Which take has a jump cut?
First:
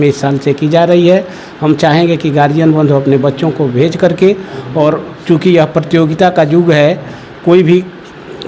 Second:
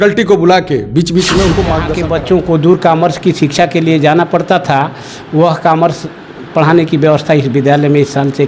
second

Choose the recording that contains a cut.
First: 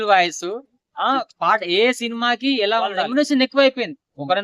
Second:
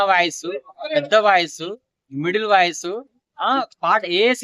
first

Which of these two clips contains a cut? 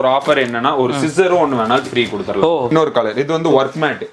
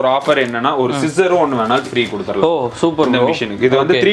first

